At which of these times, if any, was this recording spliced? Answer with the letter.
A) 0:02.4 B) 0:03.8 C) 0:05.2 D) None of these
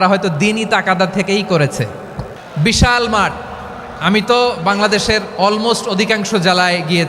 A